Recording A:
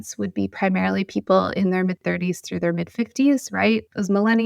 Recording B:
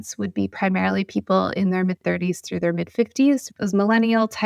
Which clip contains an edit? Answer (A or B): B